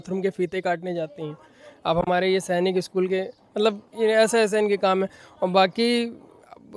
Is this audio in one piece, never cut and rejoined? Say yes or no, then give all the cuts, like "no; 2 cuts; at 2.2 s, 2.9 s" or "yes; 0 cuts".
yes; 0 cuts